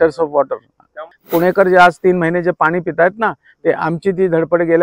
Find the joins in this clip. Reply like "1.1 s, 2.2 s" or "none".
0.9 s